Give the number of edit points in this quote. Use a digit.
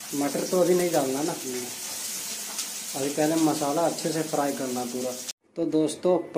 1